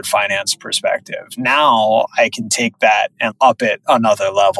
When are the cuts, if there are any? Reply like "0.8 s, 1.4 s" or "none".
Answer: 3.3 s